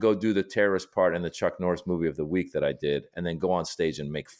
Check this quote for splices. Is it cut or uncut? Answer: uncut